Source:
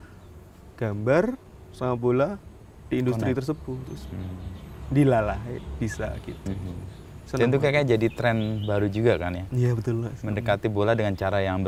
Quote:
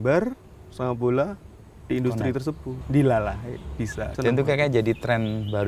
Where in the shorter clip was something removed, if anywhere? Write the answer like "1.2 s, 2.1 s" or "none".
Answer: 2.7 s, 4.0 s